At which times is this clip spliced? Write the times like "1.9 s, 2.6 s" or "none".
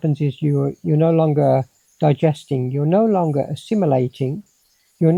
none